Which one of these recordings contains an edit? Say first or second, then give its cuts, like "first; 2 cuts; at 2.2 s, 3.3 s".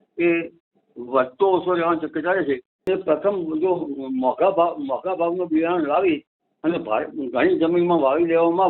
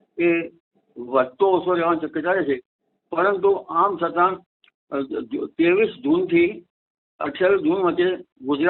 first; 1 cut; at 2.9 s